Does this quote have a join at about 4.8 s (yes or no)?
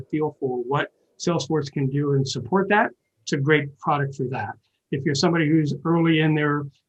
no